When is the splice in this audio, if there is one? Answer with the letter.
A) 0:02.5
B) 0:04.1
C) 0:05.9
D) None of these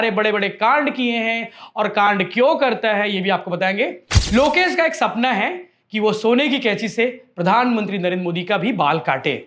D